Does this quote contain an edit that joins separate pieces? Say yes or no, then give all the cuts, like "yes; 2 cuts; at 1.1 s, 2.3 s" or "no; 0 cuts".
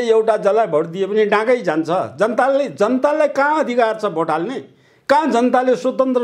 no; 0 cuts